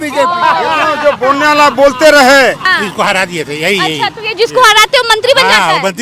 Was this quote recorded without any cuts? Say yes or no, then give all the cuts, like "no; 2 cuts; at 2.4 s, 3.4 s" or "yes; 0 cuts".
no; 1 cut; at 2.7 s